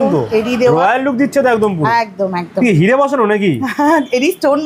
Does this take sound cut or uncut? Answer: uncut